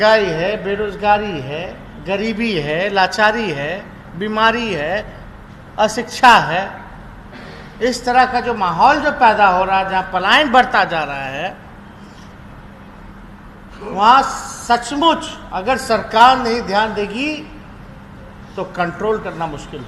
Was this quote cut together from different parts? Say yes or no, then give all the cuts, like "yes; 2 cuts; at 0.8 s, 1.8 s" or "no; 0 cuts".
no; 0 cuts